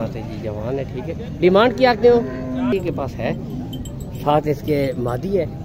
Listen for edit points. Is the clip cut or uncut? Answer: cut